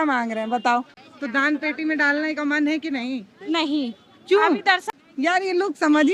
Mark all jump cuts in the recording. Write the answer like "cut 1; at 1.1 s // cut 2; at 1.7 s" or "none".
cut 1; at 1.0 s // cut 2; at 5.0 s